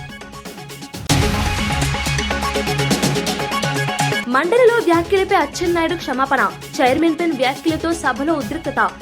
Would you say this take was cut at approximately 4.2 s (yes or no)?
yes